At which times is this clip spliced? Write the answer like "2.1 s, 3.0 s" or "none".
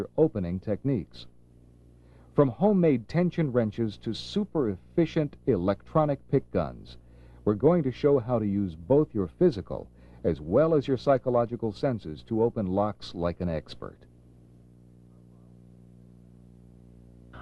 1.3 s